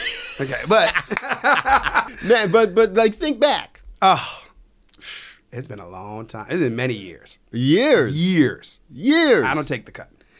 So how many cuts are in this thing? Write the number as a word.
one